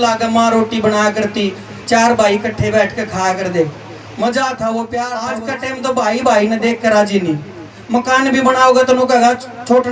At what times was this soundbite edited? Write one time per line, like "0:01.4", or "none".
0:05.4